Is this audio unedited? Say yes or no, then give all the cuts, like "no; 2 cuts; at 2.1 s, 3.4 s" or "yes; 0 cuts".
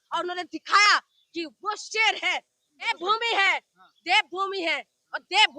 no; 1 cut; at 2.9 s